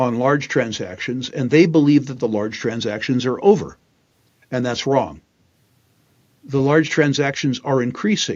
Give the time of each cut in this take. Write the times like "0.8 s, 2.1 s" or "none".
none